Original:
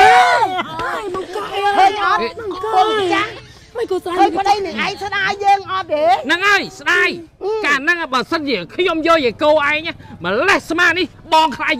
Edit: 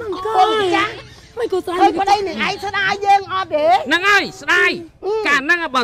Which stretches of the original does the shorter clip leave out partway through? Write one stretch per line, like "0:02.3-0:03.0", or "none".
none